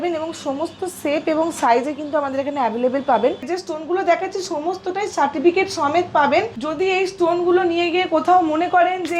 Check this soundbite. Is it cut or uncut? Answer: cut